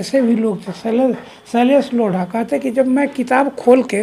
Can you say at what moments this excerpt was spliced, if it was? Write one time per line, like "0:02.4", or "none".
none